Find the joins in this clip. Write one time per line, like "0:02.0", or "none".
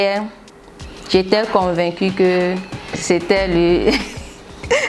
none

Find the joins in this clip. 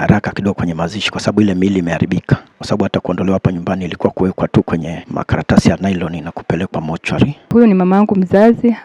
0:02.5
0:05.0
0:07.5

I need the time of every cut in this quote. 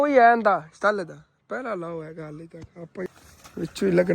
0:03.1

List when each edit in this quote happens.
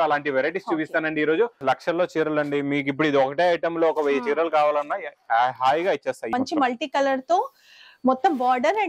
0:01.6
0:06.3

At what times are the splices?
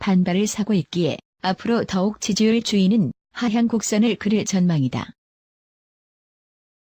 0:03.9

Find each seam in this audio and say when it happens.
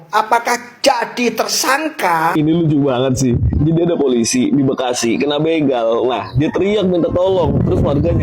0:02.3

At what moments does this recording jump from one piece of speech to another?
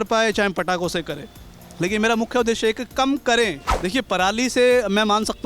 0:03.7

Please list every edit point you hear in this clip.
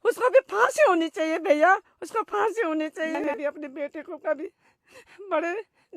0:03.2

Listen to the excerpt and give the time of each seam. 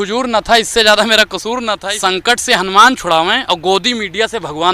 0:01.8

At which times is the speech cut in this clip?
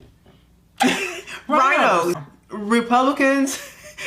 0:02.2

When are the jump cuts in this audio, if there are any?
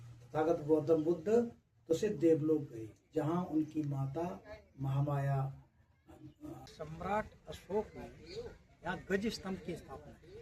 0:06.7

